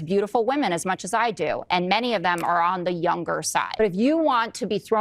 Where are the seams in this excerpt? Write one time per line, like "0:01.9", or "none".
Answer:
0:03.8